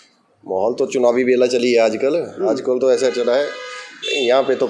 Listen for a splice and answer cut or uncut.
uncut